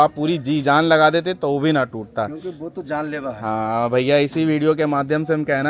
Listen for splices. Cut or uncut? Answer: uncut